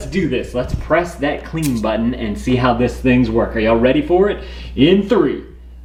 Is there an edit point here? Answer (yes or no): no